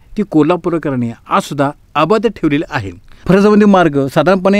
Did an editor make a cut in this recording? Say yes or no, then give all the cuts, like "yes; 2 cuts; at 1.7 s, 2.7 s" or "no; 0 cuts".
yes; 1 cut; at 3.2 s